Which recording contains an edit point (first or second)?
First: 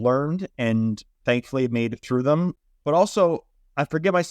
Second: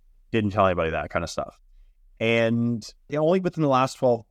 first